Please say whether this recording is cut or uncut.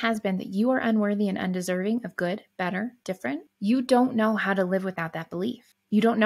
uncut